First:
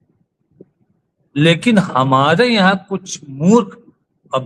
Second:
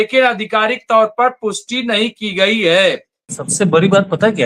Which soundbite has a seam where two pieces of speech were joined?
second; 1 cut; at 3.3 s

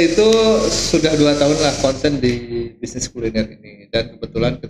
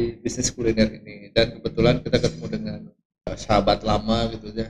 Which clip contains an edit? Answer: second; 1 cut; at 3.3 s

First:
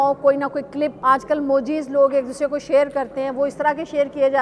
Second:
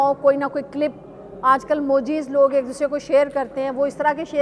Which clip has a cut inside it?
first; 1 cut; at 1.0 s

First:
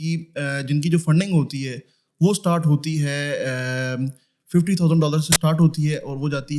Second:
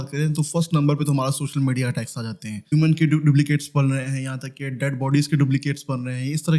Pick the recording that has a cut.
second; 1 cut; at 2.7 s

